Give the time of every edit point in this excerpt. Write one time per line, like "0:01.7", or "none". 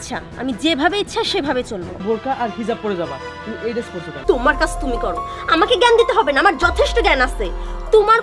0:02.0
0:04.1